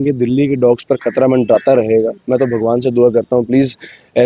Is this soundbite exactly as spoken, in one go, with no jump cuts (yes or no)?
yes